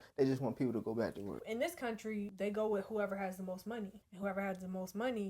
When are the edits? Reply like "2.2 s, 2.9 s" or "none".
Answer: 1.4 s, 2.3 s, 4.0 s